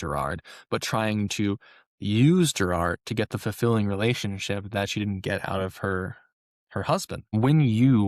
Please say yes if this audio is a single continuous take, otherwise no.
no